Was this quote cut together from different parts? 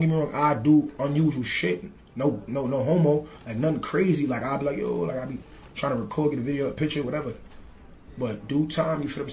yes; 1 cut; at 2.4 s

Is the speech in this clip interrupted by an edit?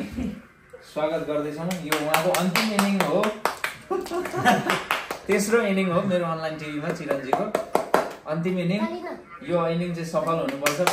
no; 0 cuts

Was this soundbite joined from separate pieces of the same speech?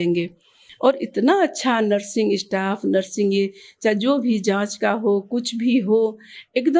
no; 0 cuts

